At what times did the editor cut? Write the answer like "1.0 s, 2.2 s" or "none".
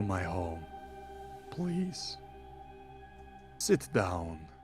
none